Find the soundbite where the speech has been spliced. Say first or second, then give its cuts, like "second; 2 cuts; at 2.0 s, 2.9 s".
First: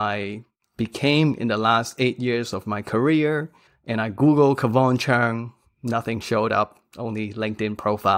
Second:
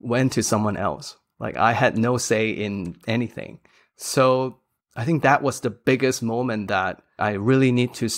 second; 1 cut; at 7.2 s